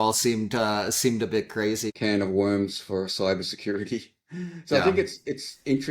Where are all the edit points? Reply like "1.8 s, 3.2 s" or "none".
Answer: 1.9 s